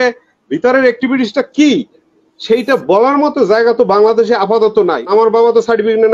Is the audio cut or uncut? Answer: cut